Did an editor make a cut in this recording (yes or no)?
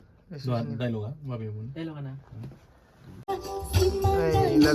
yes